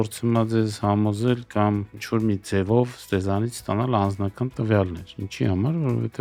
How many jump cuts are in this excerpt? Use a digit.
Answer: 0